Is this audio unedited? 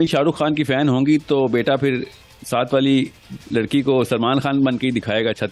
yes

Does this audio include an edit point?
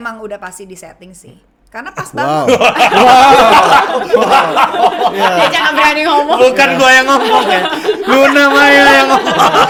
no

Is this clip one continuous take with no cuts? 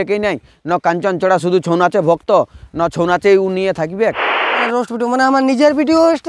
no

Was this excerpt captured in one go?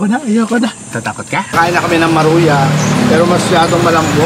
no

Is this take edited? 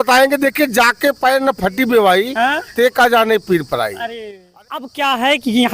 yes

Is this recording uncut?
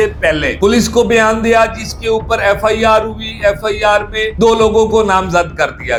yes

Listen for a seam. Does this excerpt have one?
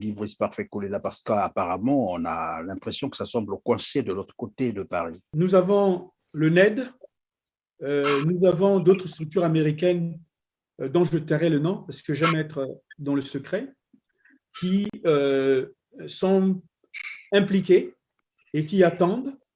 yes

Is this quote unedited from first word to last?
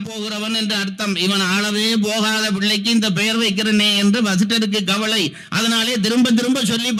yes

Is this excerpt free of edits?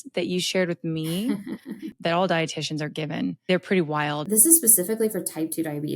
no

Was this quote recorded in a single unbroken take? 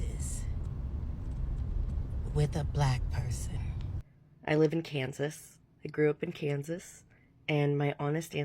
no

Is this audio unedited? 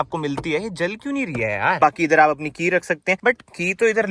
no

